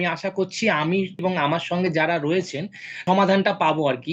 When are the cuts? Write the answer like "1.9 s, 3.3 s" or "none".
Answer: 1.2 s, 3.0 s